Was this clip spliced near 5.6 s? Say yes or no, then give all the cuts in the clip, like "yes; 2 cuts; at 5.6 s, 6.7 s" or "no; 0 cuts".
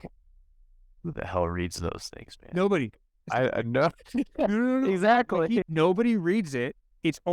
yes; 1 cut; at 5.6 s